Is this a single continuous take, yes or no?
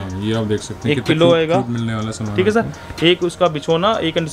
yes